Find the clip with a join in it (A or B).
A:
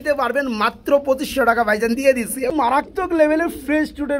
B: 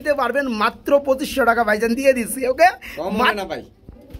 A